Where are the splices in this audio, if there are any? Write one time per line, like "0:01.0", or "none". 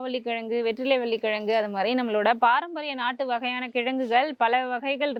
none